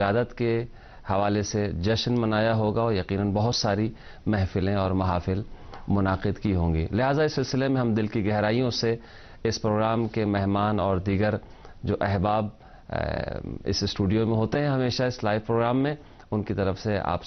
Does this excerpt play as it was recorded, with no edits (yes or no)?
no